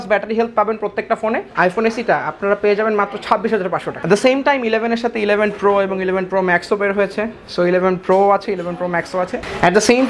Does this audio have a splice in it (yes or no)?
yes